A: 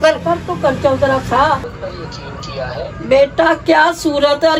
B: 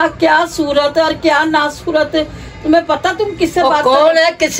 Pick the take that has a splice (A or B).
A